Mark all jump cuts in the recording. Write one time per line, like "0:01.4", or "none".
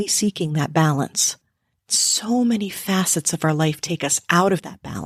none